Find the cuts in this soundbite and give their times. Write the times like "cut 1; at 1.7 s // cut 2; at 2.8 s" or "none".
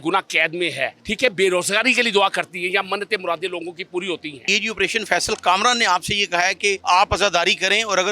cut 1; at 1.0 s // cut 2; at 4.5 s // cut 3; at 6.8 s